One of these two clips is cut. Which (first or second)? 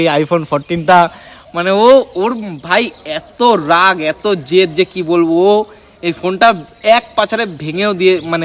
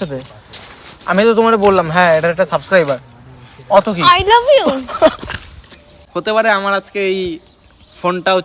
second